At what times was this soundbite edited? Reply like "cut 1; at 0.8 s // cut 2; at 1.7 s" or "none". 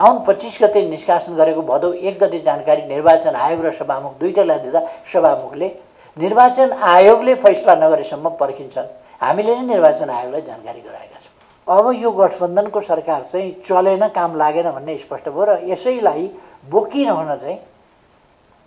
cut 1; at 11.6 s